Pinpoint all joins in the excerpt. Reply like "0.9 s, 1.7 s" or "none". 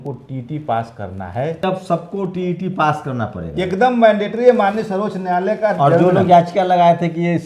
1.6 s